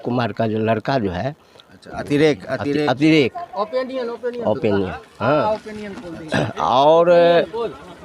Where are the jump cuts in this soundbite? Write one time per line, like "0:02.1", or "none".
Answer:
none